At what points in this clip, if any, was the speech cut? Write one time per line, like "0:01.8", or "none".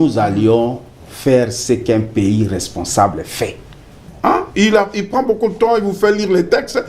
0:04.1